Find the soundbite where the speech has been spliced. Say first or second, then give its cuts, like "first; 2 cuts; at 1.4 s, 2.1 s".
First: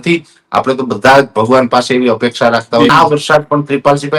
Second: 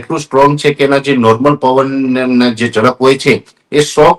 first; 1 cut; at 2.9 s